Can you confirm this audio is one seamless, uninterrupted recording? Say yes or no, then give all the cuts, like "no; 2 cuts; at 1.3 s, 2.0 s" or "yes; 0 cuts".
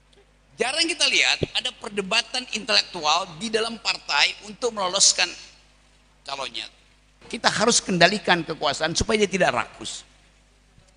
no; 1 cut; at 7.3 s